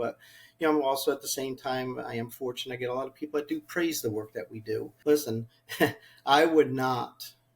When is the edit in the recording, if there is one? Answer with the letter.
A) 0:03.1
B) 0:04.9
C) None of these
B